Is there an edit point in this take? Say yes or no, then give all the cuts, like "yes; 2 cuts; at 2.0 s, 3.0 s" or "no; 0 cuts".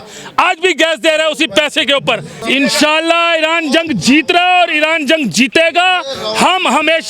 yes; 1 cut; at 2.4 s